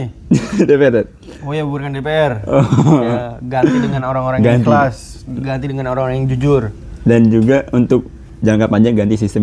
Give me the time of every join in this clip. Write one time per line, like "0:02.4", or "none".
none